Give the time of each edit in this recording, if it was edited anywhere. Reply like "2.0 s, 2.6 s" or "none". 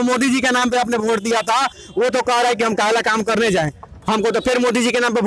none

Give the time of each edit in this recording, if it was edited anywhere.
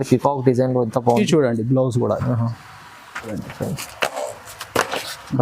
3.4 s

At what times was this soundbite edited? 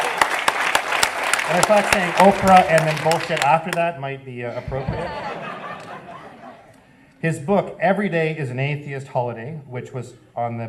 none

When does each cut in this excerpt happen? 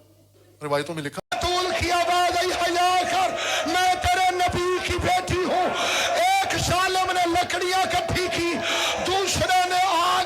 1.4 s

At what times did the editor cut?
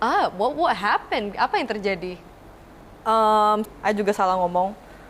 3.6 s

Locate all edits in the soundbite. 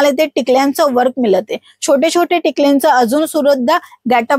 none

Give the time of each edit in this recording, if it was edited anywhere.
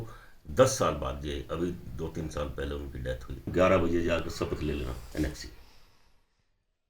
3.5 s

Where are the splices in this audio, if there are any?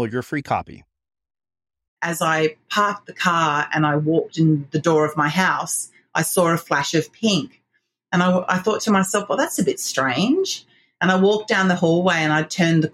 2.0 s

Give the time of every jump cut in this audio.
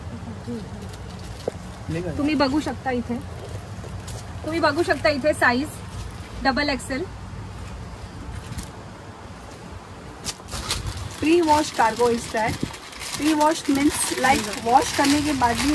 10.5 s

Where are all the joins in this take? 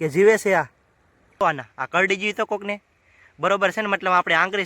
1.4 s

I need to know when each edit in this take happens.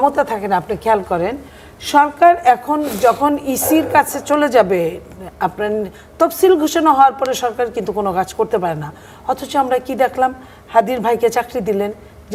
none

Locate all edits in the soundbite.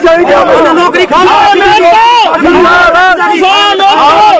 none

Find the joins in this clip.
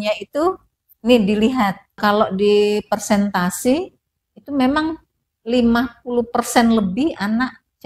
2.0 s

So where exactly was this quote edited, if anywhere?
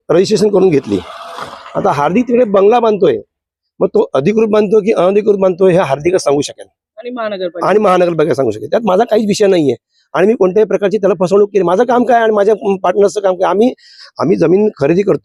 none

